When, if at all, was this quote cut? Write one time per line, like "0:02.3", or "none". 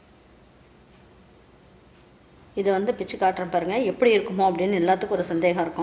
0:02.4